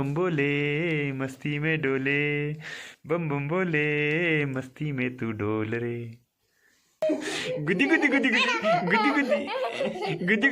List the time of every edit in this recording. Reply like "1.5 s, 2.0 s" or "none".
7.2 s

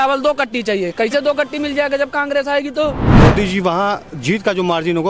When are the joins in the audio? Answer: 3.0 s

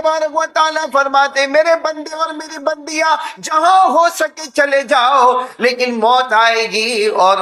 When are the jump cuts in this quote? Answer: none

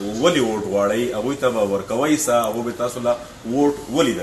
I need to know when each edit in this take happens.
none

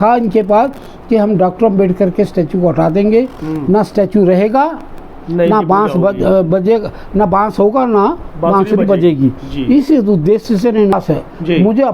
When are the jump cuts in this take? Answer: 10.9 s

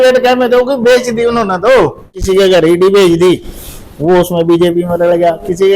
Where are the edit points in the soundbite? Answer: 2.2 s

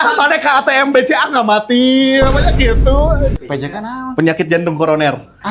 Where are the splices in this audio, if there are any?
3.4 s

